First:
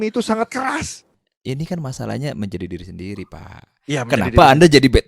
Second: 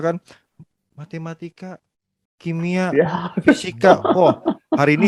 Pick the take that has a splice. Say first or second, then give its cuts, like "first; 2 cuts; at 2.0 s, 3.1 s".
first; 1 cut; at 1.2 s